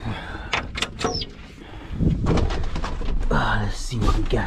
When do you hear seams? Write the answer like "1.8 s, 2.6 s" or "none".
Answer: none